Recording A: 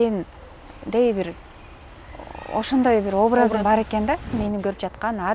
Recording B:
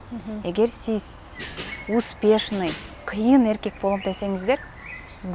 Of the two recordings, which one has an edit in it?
A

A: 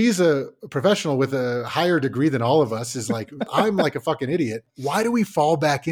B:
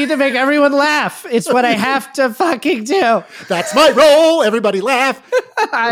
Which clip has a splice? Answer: A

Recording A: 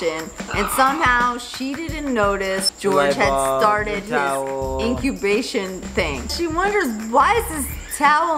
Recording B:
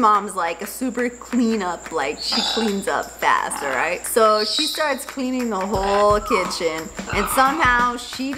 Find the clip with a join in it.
A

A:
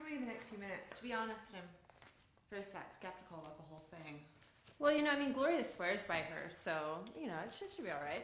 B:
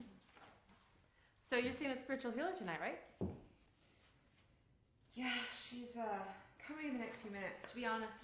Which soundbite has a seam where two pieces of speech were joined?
A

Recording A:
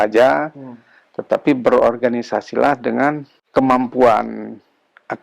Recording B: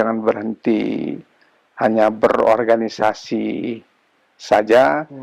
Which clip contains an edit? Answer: A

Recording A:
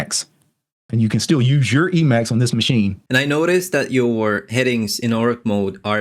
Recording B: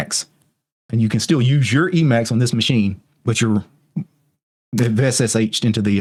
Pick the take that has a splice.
A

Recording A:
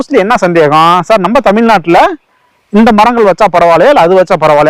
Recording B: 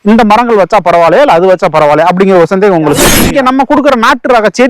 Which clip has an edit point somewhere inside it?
B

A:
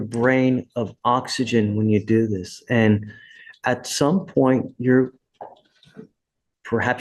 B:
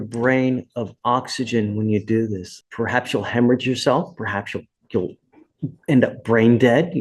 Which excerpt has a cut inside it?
B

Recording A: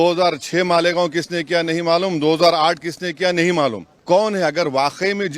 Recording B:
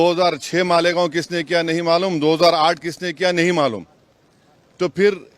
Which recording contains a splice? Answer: A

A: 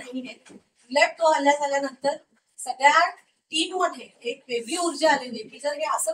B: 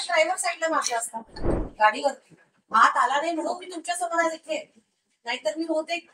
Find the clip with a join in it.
B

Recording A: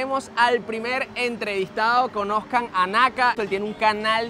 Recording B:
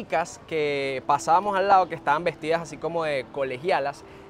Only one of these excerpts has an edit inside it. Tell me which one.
A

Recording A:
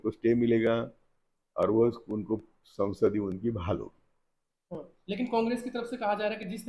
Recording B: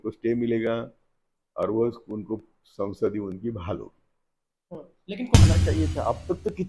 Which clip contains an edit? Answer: B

